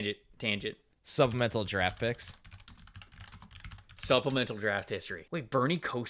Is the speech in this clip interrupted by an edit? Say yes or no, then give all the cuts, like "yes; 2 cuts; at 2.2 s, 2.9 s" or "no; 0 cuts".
yes; 1 cut; at 5.1 s